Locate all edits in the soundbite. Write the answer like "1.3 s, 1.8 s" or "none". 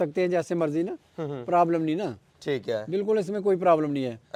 none